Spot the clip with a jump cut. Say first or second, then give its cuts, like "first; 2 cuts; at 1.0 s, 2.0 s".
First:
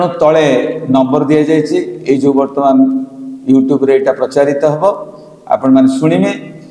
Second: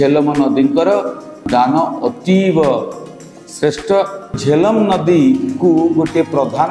second; 2 cuts; at 1.4 s, 4.4 s